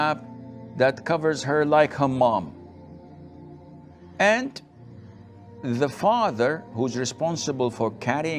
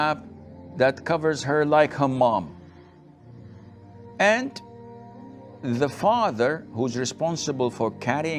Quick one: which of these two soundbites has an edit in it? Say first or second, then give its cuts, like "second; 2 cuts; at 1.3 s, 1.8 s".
first; 2 cuts; at 2.5 s, 3.8 s